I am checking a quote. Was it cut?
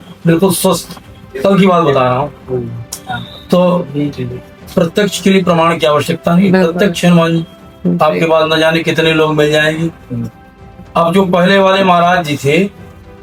no; 0 cuts

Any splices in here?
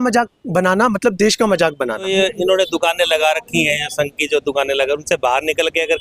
yes; 1 cut; at 2.1 s

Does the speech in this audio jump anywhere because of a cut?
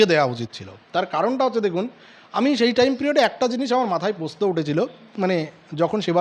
no; 0 cuts

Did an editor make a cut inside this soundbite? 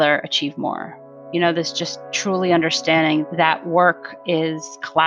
no; 0 cuts

